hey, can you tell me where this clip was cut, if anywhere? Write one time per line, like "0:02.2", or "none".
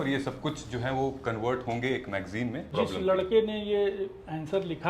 0:02.7